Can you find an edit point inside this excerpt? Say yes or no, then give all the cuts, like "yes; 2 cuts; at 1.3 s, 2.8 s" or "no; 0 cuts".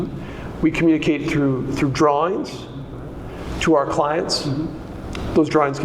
no; 0 cuts